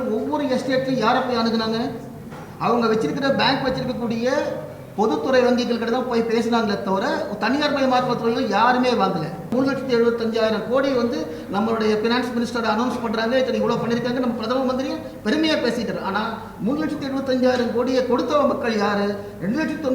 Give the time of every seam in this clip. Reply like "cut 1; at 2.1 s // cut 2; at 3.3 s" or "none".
cut 1; at 9.5 s